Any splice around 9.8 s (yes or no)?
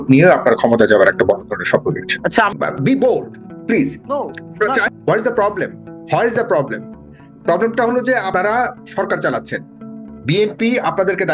no